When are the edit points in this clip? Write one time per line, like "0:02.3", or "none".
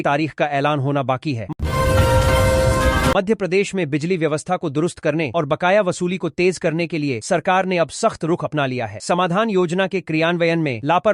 0:01.5
0:03.1